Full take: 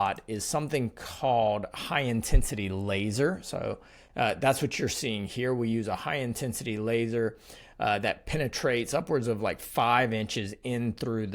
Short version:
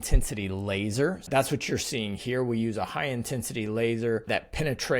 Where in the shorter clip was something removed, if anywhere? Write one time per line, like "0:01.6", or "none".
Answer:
0:01.3
0:04.3